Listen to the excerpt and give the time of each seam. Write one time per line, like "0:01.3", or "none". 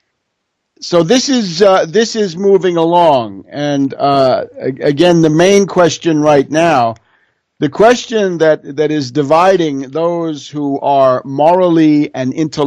0:02.5

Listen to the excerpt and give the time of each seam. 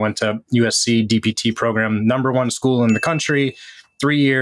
none

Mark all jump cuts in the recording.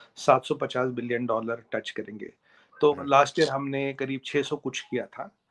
none

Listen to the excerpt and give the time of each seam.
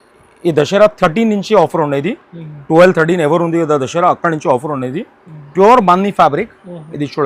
0:05.4

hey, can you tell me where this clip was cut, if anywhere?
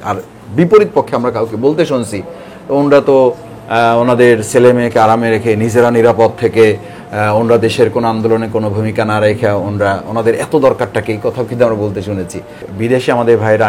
0:12.7

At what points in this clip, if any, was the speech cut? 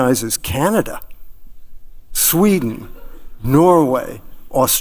none

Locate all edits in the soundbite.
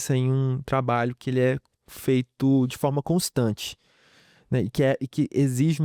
none

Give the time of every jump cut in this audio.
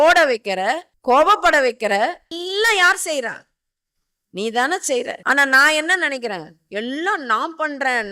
0:00.9
0:02.3
0:05.2

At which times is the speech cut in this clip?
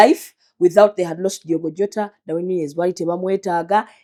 none

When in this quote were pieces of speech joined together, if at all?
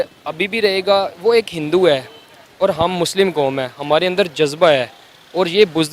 none

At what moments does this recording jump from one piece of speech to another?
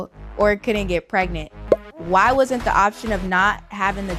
none

